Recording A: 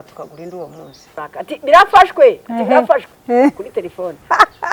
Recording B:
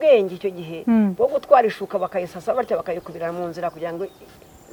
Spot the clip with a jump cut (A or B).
A